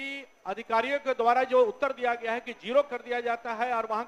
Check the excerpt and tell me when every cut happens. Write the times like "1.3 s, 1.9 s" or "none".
none